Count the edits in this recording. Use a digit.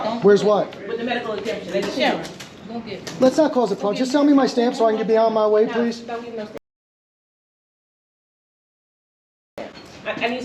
0